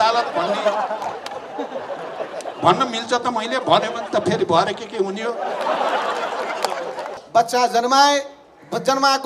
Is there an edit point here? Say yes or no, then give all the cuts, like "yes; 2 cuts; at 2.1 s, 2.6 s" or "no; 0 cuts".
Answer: yes; 1 cut; at 7.1 s